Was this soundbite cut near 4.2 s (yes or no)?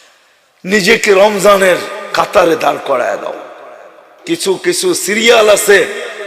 yes